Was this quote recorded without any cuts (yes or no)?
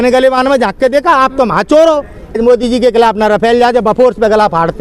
no